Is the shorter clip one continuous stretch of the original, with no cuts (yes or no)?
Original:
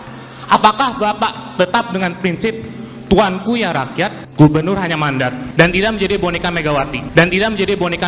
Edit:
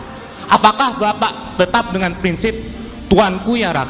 yes